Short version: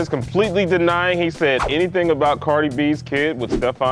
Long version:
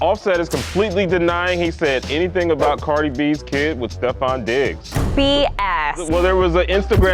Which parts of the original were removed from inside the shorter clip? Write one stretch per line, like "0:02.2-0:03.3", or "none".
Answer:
none